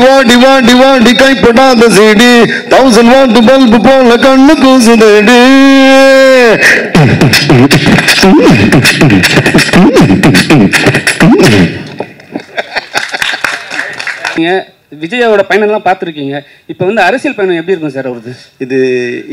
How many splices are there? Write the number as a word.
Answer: one